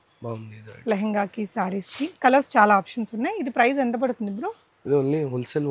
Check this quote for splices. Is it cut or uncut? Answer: uncut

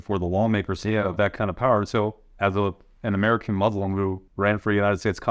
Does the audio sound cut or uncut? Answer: cut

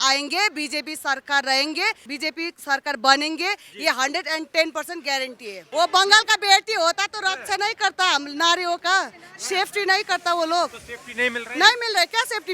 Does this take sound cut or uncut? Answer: cut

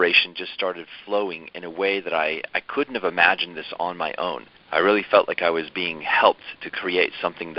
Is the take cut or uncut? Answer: cut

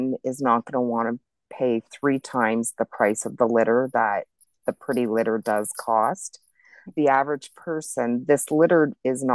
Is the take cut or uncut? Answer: uncut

